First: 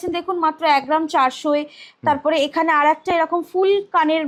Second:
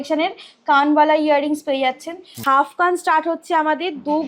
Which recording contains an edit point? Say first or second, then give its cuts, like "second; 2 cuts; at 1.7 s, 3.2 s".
second; 1 cut; at 2.3 s